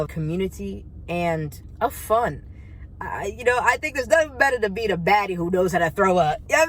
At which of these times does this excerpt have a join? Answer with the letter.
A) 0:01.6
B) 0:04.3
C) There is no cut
A